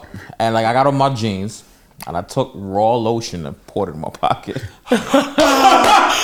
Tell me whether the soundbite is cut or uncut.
uncut